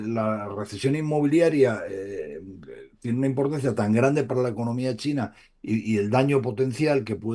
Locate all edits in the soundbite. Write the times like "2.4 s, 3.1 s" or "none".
none